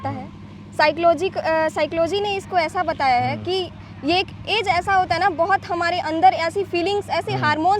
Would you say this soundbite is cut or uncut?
uncut